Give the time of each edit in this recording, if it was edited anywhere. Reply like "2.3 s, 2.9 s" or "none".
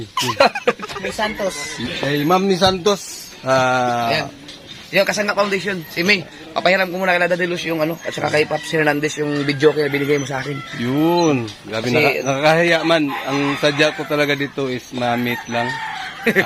none